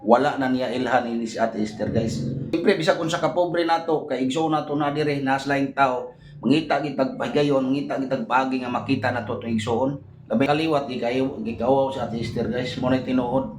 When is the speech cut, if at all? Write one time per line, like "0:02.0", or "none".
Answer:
0:02.4
0:10.5